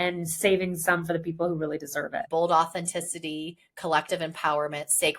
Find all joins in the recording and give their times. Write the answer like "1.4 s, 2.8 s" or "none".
2.3 s